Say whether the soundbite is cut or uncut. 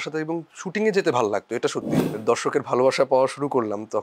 cut